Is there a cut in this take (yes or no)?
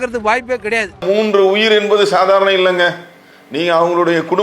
no